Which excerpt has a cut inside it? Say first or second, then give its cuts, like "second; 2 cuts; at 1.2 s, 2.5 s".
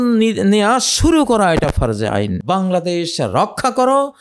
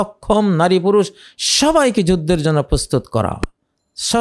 first; 1 cut; at 2.4 s